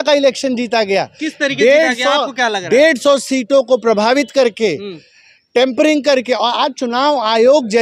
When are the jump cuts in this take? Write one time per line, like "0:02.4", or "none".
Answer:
none